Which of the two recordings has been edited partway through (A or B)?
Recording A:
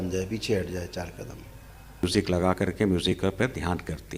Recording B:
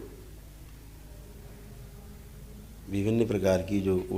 A